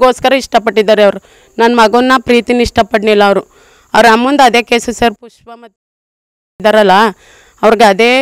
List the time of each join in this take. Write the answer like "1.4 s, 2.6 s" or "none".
none